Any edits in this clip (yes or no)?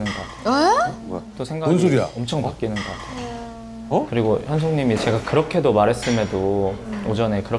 no